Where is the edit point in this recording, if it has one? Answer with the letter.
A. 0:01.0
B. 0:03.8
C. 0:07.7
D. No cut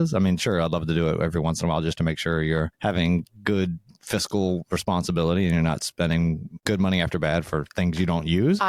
D